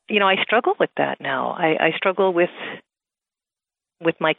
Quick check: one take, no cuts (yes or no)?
yes